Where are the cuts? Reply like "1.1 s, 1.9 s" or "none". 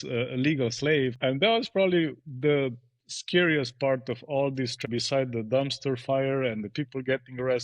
1.2 s, 4.8 s